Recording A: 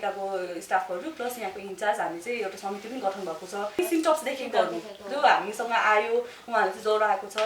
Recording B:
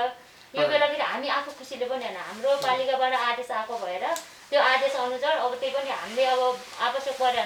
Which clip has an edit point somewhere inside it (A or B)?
A